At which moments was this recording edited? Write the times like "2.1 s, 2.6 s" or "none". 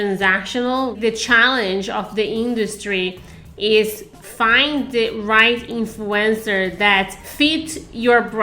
1.0 s, 7.2 s